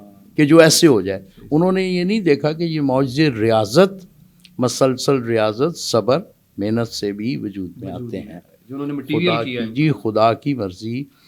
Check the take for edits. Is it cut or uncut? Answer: uncut